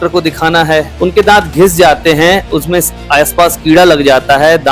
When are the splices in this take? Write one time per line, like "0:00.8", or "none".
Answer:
0:00.9